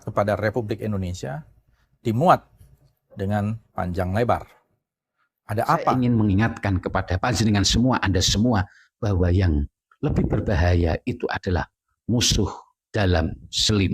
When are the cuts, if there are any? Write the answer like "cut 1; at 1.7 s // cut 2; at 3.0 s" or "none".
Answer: cut 1; at 5.9 s